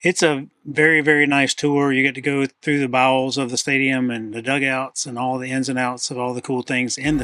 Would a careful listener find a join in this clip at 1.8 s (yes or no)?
no